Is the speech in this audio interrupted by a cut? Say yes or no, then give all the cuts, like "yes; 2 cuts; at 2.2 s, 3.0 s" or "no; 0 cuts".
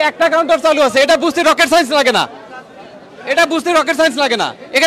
no; 0 cuts